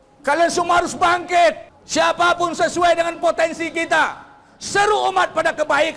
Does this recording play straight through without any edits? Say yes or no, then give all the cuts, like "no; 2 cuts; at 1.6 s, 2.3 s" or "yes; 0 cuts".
no; 1 cut; at 1.7 s